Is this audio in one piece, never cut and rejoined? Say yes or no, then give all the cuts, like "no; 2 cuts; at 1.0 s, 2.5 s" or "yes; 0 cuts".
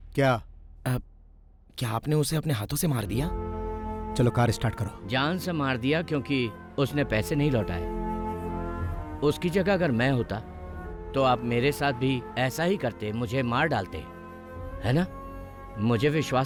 yes; 0 cuts